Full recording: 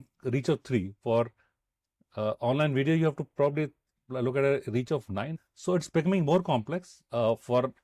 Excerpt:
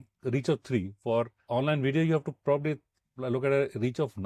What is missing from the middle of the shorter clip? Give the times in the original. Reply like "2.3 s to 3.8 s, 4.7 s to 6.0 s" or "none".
1.5 s to 2.4 s